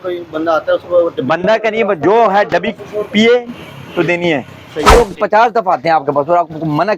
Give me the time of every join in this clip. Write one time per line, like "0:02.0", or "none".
0:05.0